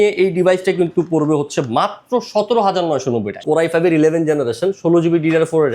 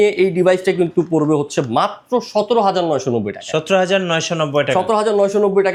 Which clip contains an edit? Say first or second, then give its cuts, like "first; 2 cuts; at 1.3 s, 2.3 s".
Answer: first; 1 cut; at 3.4 s